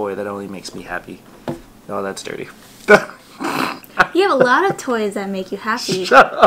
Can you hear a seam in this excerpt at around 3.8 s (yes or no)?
yes